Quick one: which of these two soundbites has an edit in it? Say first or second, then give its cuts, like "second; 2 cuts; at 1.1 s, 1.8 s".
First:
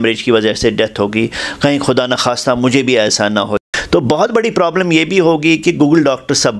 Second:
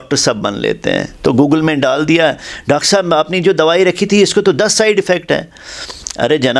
first; 1 cut; at 3.6 s